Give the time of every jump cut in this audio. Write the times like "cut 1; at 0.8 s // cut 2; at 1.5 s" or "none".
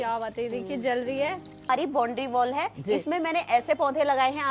cut 1; at 1.7 s